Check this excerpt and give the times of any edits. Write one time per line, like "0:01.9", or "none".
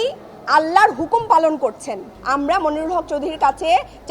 0:02.1